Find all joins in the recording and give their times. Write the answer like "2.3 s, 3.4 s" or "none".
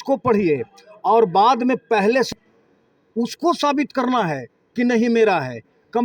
2.3 s